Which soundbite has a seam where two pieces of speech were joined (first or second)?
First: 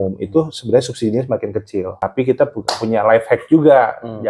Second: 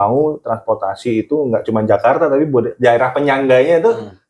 first